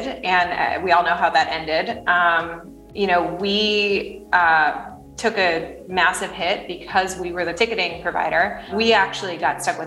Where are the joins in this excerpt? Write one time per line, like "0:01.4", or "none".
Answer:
0:07.5
0:08.7